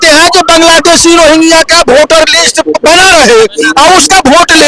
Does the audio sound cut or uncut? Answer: uncut